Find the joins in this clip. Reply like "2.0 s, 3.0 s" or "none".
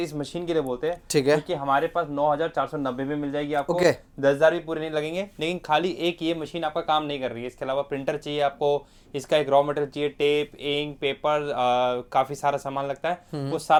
none